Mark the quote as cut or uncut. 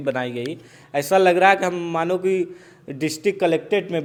uncut